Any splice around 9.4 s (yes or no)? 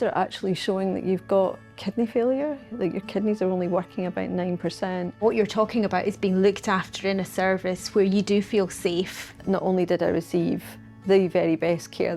yes